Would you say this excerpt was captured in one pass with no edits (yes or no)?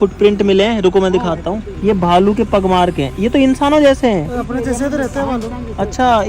yes